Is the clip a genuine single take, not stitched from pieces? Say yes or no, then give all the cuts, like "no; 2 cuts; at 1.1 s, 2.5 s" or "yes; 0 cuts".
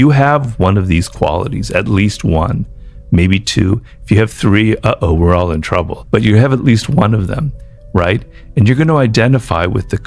yes; 0 cuts